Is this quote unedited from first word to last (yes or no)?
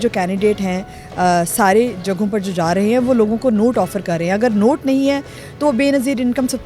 yes